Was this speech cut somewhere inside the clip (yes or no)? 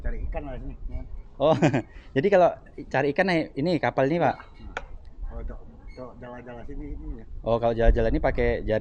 no